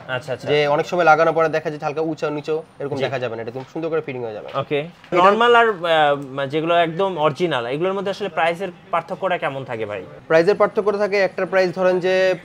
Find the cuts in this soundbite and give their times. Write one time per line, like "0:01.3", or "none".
0:05.1